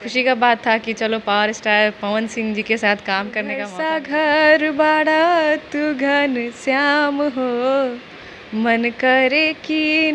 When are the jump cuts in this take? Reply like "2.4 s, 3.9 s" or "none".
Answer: 3.7 s